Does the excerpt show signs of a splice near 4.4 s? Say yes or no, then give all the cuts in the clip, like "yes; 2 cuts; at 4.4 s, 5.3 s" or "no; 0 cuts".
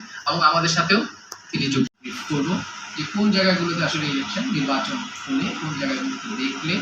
no; 1 cut; at 2.0 s